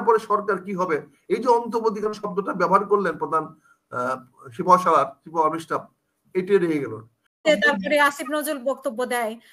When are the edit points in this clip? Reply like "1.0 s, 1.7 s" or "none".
7.5 s